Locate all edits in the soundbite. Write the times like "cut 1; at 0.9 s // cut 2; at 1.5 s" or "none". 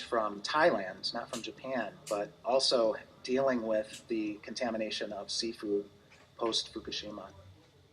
cut 1; at 5.8 s